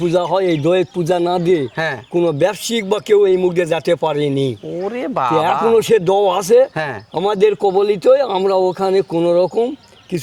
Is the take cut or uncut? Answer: uncut